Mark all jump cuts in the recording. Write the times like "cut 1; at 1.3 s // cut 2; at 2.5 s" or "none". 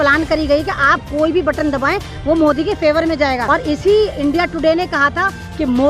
cut 1; at 3.4 s